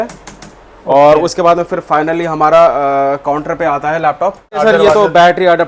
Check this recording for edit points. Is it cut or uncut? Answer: cut